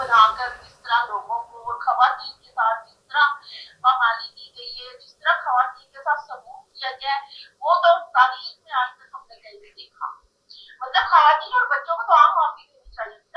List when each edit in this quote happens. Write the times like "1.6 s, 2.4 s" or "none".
none